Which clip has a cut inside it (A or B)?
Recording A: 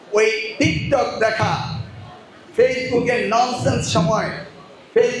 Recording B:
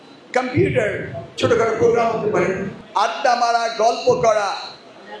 B